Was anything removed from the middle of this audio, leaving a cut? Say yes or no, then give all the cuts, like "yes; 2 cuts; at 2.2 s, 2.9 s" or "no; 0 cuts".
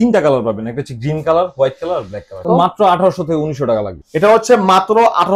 yes; 1 cut; at 2.4 s